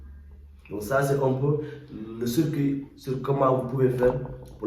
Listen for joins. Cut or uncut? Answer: uncut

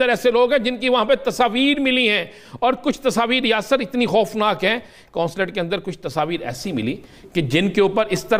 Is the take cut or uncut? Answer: uncut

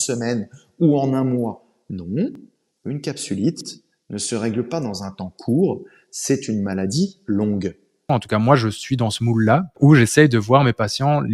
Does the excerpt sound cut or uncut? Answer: cut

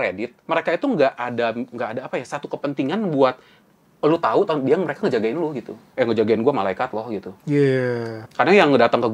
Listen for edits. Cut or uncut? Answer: cut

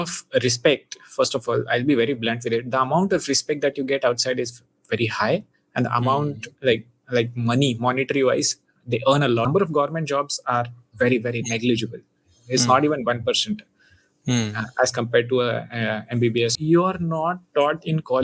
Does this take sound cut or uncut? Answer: cut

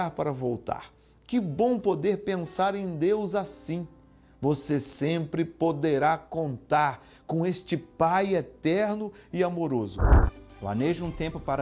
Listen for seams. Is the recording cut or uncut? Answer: cut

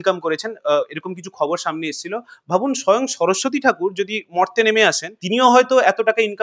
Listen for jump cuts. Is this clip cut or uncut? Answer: cut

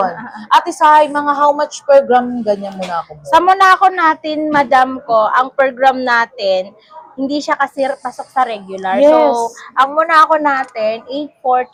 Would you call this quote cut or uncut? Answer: uncut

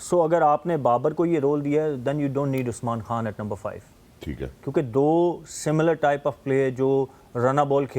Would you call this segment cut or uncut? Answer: uncut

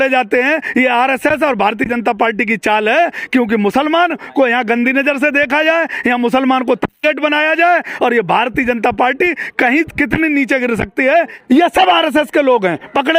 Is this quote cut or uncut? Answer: cut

